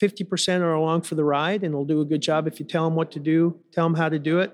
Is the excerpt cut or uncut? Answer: cut